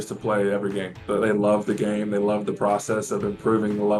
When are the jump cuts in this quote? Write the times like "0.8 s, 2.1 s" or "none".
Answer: 1.0 s